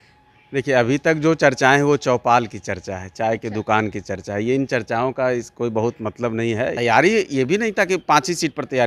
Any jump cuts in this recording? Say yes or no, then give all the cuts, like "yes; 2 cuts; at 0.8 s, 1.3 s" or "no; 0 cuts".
yes; 1 cut; at 6.7 s